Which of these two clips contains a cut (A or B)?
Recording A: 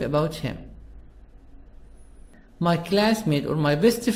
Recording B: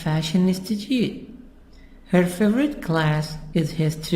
B